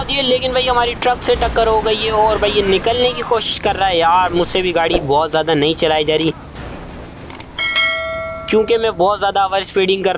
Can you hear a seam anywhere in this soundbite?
no; 0 cuts

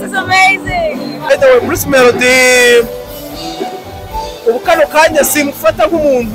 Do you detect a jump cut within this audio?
yes; 1 cut; at 1.3 s

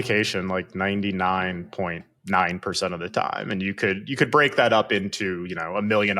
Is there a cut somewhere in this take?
no; 0 cuts

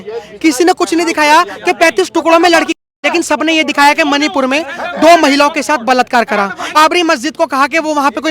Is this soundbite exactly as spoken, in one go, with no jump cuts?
no; 1 cut; at 6.6 s

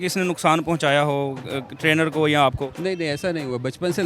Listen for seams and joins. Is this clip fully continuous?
no; 1 cut; at 2.7 s

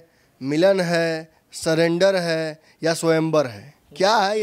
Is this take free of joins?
yes; 0 cuts

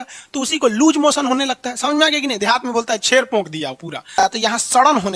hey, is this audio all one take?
no; 1 cut; at 4.1 s

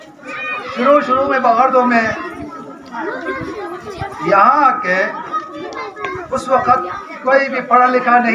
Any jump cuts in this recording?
no; 0 cuts

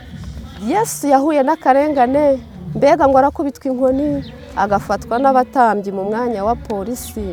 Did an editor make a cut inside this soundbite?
no; 0 cuts

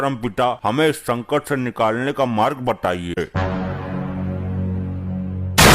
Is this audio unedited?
no; 1 cut; at 3.2 s

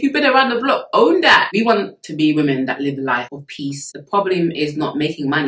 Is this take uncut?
no; 2 cuts; at 1.5 s, 4.0 s

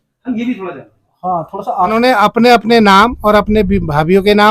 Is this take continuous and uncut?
no; 1 cut; at 1.9 s

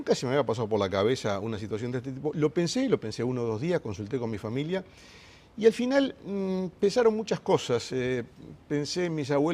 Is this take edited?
yes; 1 cut; at 7.6 s

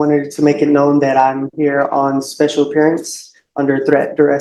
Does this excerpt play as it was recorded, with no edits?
yes; 0 cuts

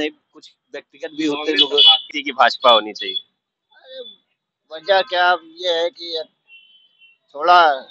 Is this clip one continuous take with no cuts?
no; 1 cut; at 2.2 s

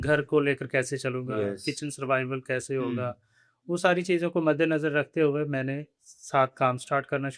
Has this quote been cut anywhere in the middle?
no; 0 cuts

